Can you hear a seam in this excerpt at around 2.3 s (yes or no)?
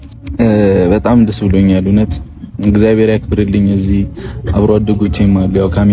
no